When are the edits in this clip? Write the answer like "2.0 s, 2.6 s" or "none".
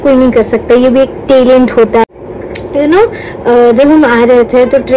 2.0 s